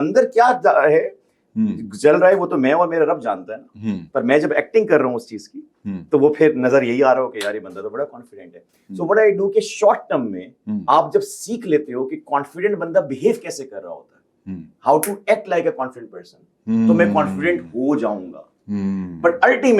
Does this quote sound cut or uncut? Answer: uncut